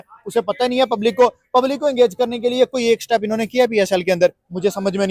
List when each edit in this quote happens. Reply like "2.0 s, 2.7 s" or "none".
none